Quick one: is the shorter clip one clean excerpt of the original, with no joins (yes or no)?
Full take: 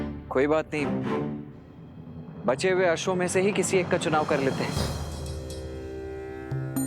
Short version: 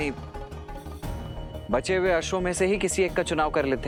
yes